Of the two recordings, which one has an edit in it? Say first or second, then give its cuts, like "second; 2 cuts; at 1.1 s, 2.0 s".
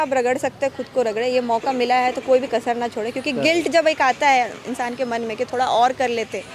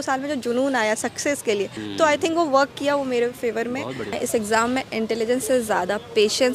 second; 2 cuts; at 1.8 s, 4.2 s